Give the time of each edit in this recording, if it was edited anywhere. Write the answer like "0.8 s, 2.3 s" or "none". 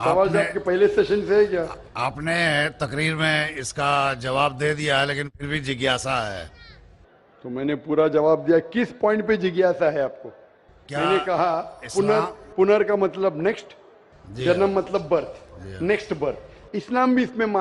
10.7 s